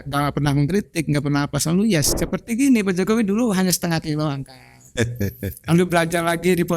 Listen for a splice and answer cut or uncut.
cut